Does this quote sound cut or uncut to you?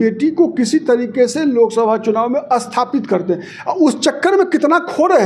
uncut